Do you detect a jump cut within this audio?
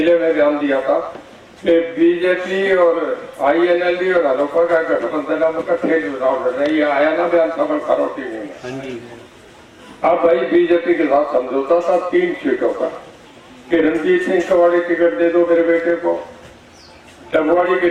no; 0 cuts

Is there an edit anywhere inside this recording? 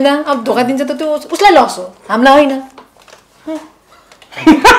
no; 0 cuts

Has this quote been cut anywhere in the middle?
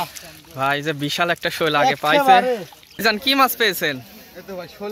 yes; 1 cut; at 2.9 s

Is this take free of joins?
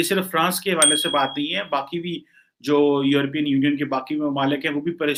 yes; 0 cuts

